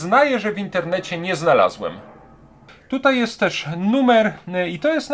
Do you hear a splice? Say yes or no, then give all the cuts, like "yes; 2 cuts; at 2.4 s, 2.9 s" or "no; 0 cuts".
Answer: yes; 1 cut; at 2.7 s